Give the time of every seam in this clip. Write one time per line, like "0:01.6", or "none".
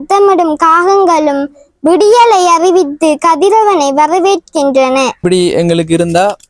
0:05.2